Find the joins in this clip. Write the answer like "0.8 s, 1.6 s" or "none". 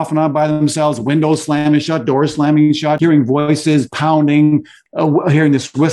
3.0 s, 4.8 s